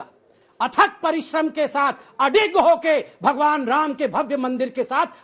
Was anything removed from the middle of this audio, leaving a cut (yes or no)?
no